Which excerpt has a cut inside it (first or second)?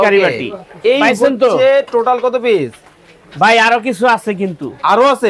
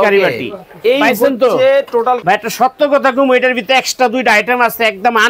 second